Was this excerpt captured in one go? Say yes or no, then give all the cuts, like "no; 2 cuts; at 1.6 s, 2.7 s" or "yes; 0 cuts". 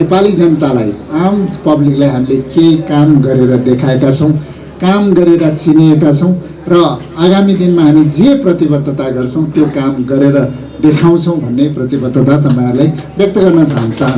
yes; 0 cuts